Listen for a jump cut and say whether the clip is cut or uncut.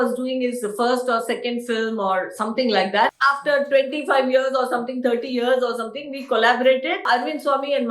cut